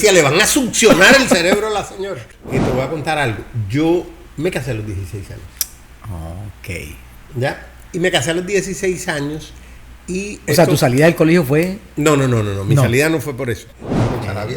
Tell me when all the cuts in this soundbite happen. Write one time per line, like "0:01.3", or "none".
0:02.2
0:13.7

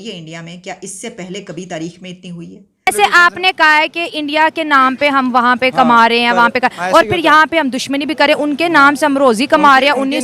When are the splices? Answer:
0:02.9

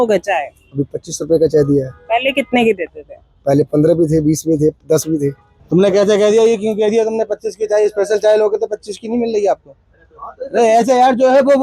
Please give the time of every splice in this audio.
0:05.6

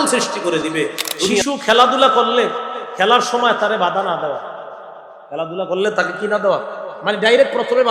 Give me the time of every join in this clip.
0:01.4

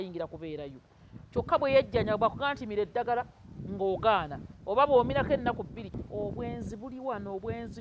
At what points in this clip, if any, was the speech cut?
0:05.8

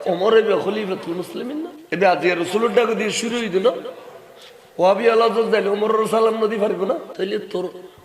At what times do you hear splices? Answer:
0:01.8
0:07.1

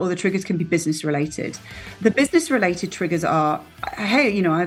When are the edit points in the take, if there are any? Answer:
none

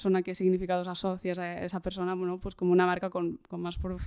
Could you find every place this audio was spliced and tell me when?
none

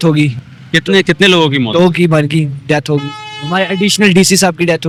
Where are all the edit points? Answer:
none

